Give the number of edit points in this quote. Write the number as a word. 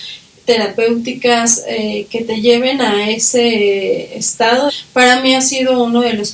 one